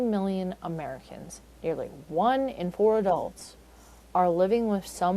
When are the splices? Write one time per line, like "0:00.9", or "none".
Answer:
none